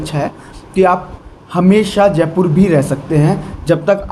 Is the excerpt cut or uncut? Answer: uncut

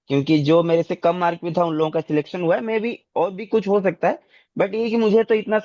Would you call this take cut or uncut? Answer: uncut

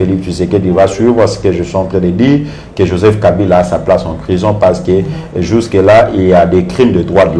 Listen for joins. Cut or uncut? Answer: uncut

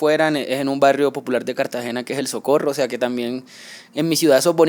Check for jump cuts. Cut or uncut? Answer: uncut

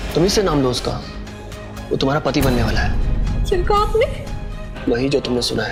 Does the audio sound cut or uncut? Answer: uncut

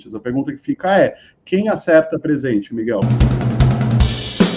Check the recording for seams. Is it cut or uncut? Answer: cut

